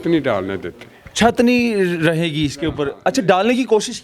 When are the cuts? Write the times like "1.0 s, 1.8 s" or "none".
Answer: none